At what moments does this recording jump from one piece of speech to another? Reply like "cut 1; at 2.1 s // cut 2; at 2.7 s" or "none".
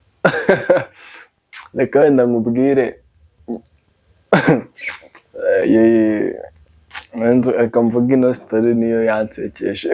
none